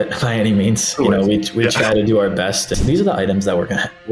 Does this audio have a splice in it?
yes; 1 cut; at 2.7 s

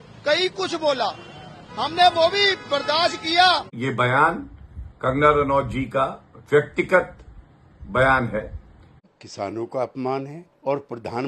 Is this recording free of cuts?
no; 2 cuts; at 3.7 s, 9.0 s

